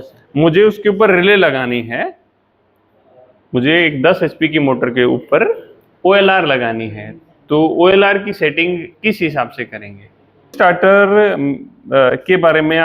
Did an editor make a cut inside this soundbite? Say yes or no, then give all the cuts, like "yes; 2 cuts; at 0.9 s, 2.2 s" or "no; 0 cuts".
yes; 1 cut; at 10.5 s